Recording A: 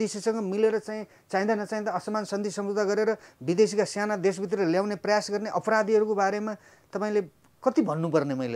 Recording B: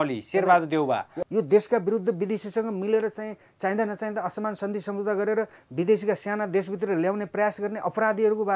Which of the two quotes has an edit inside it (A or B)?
B